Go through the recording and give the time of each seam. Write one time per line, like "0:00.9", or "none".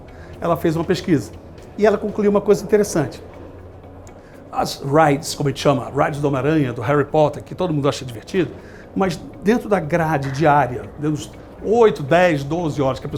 none

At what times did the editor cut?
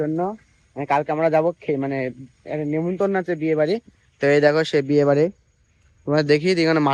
none

